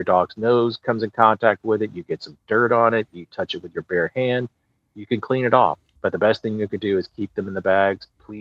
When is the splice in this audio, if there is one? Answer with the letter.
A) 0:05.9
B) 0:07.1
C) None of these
A